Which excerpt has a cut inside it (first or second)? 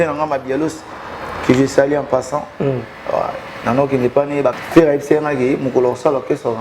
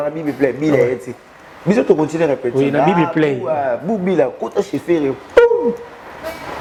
first